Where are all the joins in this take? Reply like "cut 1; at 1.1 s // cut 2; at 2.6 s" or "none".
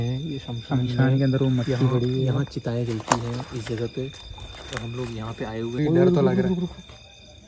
cut 1; at 5.8 s